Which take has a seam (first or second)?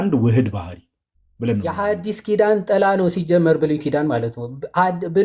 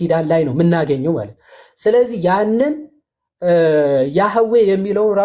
first